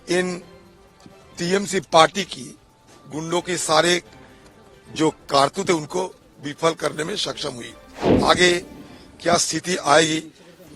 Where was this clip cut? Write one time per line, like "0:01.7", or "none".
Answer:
0:08.1